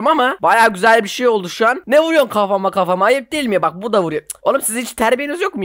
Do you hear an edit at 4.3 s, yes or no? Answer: no